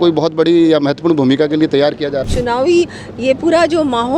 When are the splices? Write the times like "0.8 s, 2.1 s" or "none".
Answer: 2.3 s